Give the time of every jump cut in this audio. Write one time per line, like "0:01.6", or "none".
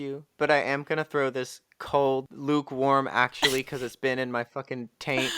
0:02.3